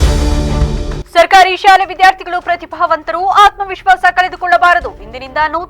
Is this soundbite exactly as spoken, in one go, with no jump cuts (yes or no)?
no